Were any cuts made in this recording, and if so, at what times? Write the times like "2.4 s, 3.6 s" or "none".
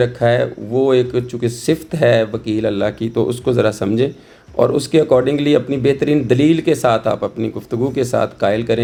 none